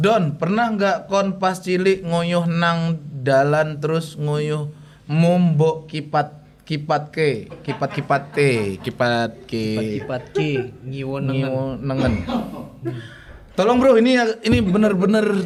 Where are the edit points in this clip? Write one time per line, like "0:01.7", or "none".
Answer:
none